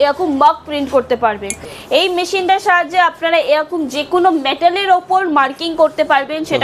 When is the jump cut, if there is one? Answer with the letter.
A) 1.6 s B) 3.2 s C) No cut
A